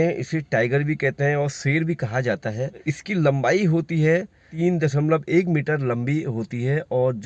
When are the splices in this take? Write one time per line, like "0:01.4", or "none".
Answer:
0:02.9
0:04.5

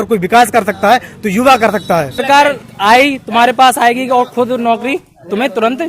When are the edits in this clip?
0:02.2

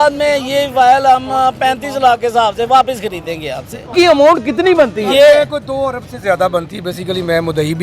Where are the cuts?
0:03.9

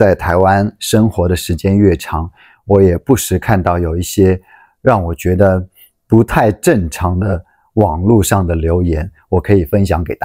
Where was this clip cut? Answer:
none

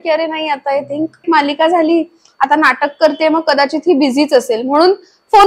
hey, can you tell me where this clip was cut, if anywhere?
0:01.2

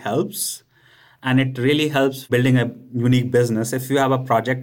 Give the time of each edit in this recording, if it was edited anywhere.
0:02.3

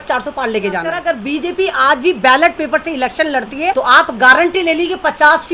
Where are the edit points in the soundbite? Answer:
0:01.0
0:03.7

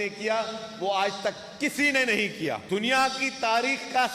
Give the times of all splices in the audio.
0:02.6

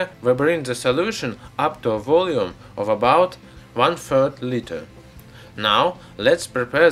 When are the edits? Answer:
0:04.3

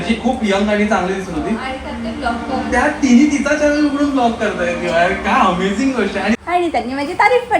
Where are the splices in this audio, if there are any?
0:06.0

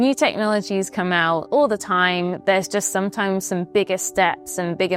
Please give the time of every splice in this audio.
none

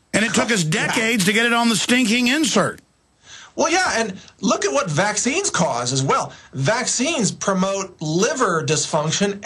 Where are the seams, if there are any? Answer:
0:07.2

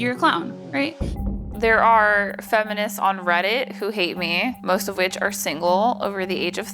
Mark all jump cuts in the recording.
0:01.2
0:04.6

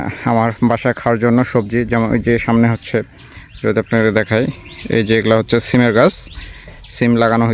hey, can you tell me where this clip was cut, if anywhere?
none

